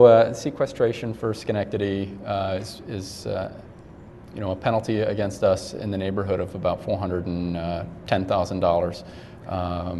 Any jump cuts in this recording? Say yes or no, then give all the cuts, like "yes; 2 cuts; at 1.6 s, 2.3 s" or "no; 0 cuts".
yes; 1 cut; at 3.9 s